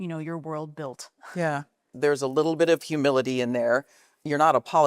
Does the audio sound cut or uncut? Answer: cut